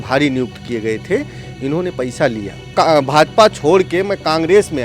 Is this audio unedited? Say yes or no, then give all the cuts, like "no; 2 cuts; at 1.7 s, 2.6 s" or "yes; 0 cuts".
no; 1 cut; at 2.7 s